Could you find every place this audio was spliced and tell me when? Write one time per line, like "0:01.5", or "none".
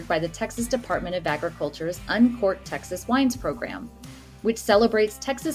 none

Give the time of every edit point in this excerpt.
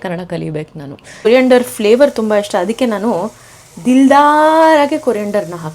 0:01.3

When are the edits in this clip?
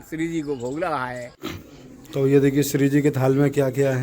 0:01.3

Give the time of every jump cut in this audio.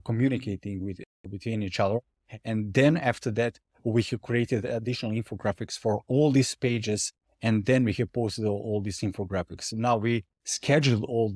none

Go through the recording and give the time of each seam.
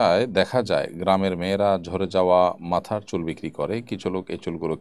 none

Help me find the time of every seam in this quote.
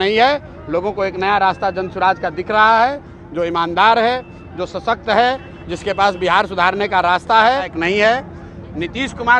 0:07.7

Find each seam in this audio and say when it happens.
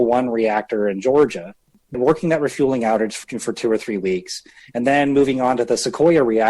0:02.0
0:03.2

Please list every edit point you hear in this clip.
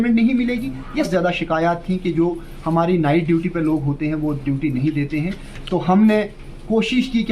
0:01.1

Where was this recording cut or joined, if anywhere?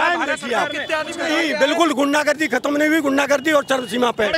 0:01.2

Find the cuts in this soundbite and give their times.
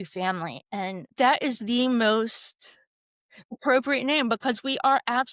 0:01.1

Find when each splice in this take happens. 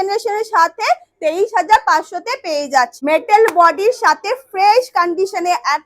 0:03.0

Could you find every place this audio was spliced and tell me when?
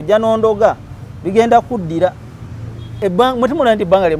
0:02.9

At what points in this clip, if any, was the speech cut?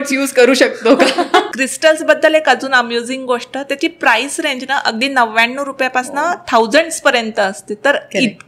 0:01.5

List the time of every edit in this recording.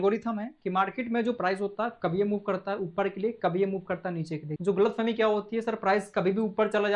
0:04.4

